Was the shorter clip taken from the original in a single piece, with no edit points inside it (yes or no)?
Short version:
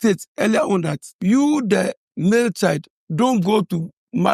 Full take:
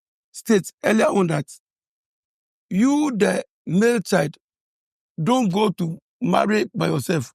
no